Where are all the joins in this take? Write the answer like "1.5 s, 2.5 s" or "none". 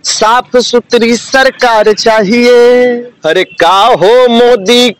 3.1 s